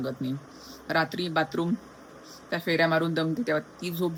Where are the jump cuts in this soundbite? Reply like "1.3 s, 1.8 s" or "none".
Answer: none